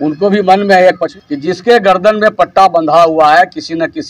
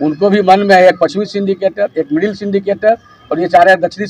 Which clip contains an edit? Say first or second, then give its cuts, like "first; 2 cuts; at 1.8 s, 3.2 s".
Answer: first; 1 cut; at 1.1 s